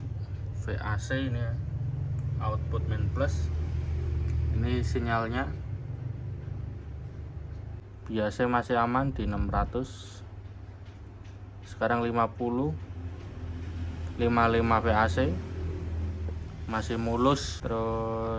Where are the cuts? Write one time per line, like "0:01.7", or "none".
0:07.8
0:17.5